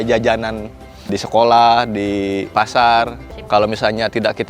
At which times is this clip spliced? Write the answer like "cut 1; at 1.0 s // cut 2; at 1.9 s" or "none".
cut 1; at 1.2 s // cut 2; at 2.5 s // cut 3; at 3.3 s